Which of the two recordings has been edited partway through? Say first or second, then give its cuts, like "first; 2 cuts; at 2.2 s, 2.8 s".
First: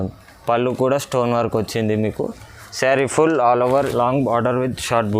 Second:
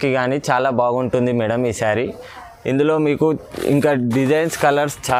first; 1 cut; at 3.9 s